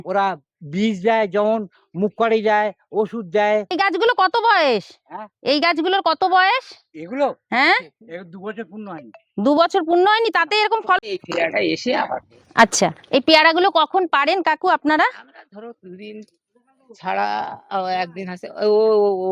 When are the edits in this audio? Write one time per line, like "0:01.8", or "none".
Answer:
0:03.7
0:11.0